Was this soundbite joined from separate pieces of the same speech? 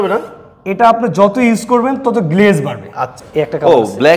yes; 1 cut; at 3.2 s

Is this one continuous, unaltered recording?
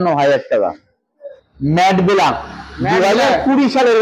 no; 1 cut; at 1.3 s

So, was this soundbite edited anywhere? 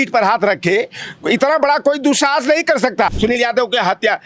yes; 1 cut; at 3.1 s

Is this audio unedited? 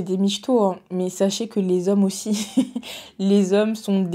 yes; 0 cuts

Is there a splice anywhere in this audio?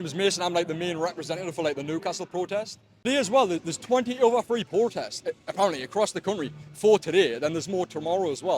yes; 1 cut; at 3.0 s

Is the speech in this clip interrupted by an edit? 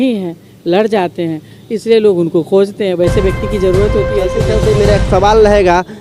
yes; 1 cut; at 4.4 s

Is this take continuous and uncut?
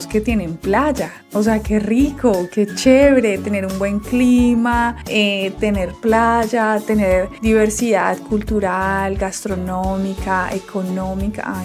yes; 0 cuts

